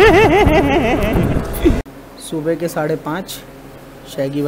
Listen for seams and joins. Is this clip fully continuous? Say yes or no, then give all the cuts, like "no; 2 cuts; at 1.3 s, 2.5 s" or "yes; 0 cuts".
no; 1 cut; at 1.8 s